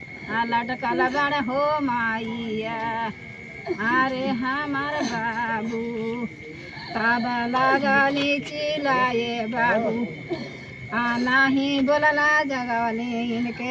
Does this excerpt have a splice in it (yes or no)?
no